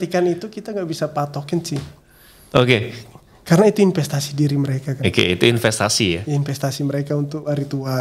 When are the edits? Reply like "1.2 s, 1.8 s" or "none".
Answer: none